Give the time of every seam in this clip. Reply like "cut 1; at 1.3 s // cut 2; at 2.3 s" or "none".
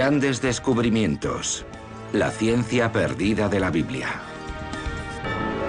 none

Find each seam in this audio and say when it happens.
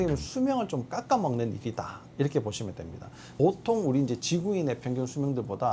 cut 1; at 3.2 s

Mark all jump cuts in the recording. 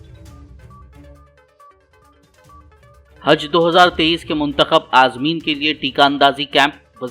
cut 1; at 1.1 s

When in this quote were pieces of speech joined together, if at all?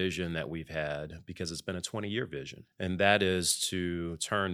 cut 1; at 2.6 s

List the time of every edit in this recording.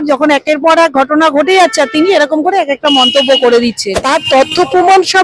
cut 1; at 4.0 s

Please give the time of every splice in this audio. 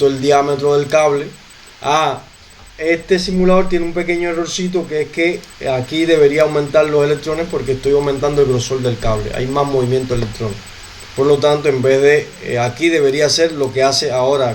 none

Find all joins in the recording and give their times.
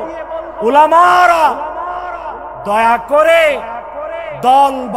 none

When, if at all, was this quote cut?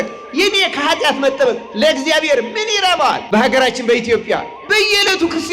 cut 1; at 3.2 s

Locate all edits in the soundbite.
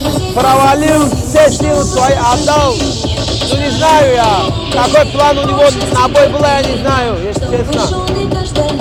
none

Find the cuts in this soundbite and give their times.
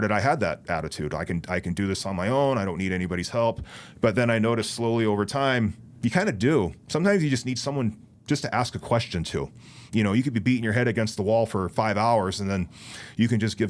none

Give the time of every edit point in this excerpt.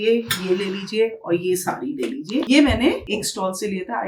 none

